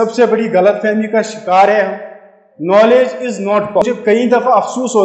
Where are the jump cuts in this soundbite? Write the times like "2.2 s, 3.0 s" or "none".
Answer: 3.8 s